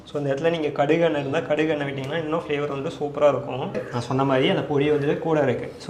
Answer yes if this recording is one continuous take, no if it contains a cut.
no